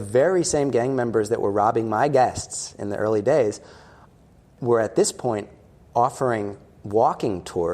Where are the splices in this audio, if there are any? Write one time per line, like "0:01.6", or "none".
0:04.5